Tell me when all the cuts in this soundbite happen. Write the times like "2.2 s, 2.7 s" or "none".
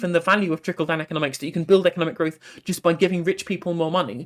none